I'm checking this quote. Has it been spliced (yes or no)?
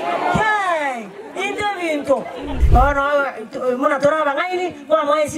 yes